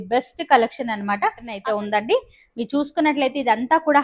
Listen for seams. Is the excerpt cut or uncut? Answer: cut